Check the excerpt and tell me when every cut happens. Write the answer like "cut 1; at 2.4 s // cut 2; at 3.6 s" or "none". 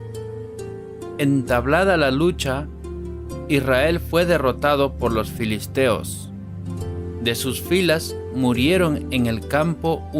cut 1; at 7.1 s